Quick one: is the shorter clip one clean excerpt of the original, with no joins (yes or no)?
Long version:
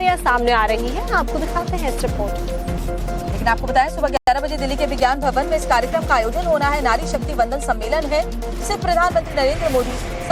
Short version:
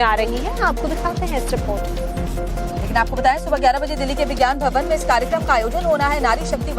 no